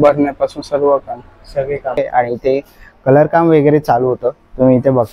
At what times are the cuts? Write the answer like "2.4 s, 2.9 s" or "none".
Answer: 2.0 s